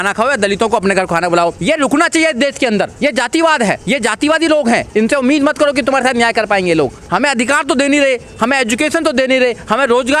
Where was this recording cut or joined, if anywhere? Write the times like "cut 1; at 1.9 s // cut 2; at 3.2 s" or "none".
cut 1; at 1.6 s // cut 2; at 2.9 s // cut 3; at 3.8 s // cut 4; at 4.9 s // cut 5; at 7.0 s